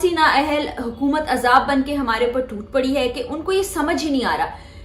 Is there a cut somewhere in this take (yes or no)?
no